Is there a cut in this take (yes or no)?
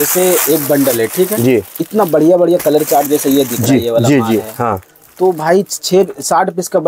no